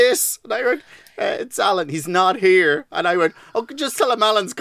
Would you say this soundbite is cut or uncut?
uncut